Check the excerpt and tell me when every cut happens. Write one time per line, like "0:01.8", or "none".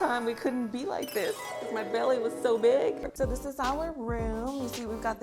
0:03.0